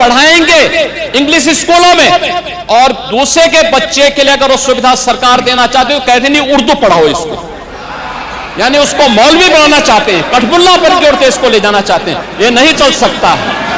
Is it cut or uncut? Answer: uncut